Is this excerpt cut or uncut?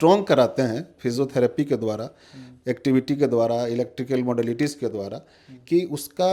uncut